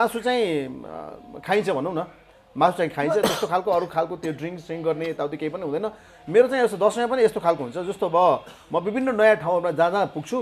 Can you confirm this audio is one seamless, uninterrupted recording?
yes; 0 cuts

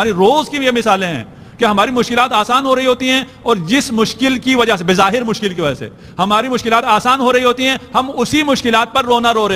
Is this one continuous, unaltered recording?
yes; 0 cuts

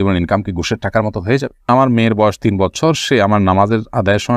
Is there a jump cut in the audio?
yes; 1 cut; at 1.7 s

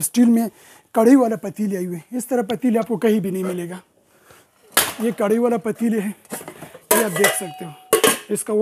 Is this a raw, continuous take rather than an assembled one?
yes; 0 cuts

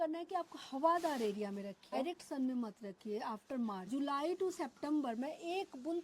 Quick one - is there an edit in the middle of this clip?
yes; 2 cuts; at 2.0 s, 3.8 s

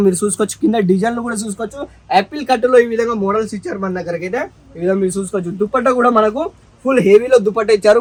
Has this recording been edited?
no; 0 cuts

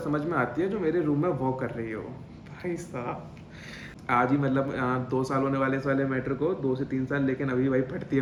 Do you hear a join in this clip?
no; 0 cuts

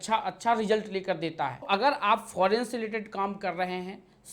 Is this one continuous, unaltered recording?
no; 1 cut; at 1.7 s

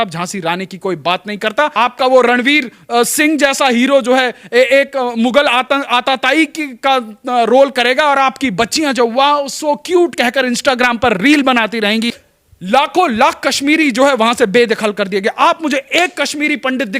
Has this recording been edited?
yes; 2 cuts; at 1.7 s, 12.2 s

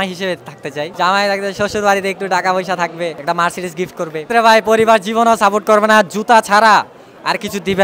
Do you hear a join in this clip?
yes; 3 cuts; at 0.9 s, 3.2 s, 4.3 s

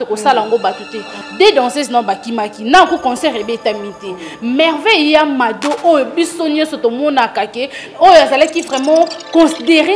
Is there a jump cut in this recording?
yes; 1 cut; at 1.2 s

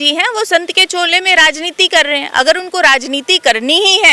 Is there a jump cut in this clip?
no; 0 cuts

